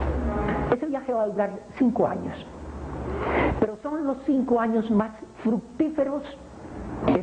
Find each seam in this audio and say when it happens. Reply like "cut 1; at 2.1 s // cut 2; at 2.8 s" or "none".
cut 1; at 4.4 s